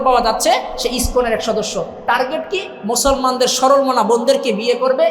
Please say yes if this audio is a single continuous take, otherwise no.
yes